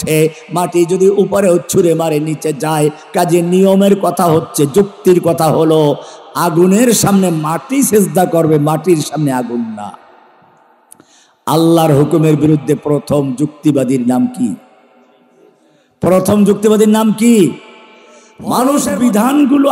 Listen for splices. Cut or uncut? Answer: cut